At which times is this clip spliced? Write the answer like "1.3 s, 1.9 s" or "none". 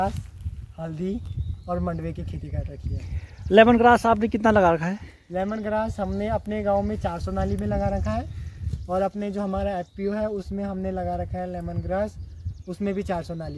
none